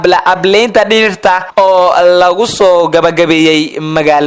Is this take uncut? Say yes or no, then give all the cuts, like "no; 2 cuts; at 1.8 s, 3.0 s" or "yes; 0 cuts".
no; 1 cut; at 1.5 s